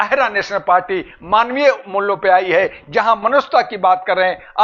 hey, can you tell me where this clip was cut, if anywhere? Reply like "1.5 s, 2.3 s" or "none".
none